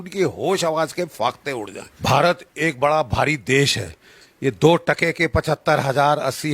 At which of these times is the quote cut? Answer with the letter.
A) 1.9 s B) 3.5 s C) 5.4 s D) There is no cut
A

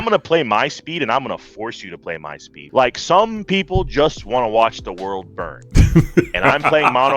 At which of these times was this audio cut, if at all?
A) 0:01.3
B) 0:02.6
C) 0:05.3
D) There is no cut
B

